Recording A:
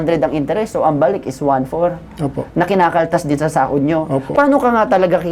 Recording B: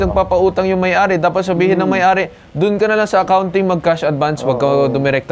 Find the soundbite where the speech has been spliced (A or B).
A